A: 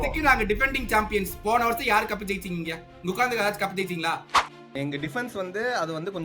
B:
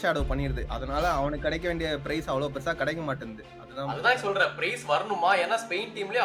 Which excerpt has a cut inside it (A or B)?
A